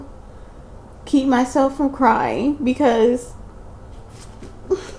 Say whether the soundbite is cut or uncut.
uncut